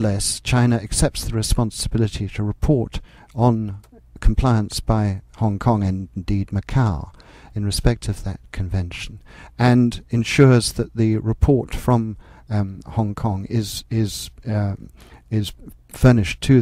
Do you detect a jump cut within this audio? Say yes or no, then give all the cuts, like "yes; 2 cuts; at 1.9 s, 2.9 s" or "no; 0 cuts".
no; 0 cuts